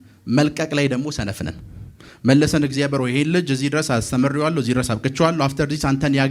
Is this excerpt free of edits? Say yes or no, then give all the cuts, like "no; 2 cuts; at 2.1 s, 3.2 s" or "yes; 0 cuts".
yes; 0 cuts